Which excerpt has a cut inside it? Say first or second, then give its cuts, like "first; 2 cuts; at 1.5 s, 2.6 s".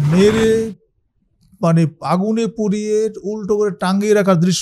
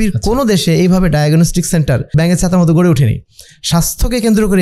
second; 1 cut; at 2.1 s